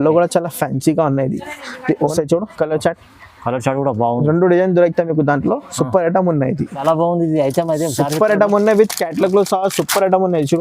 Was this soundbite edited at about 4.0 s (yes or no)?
no